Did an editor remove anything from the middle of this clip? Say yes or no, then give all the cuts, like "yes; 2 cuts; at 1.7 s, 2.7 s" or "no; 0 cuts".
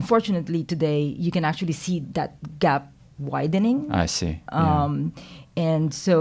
no; 0 cuts